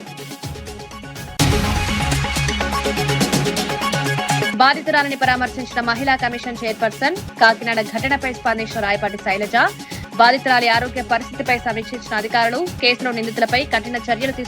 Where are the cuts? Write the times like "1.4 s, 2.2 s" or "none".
1.1 s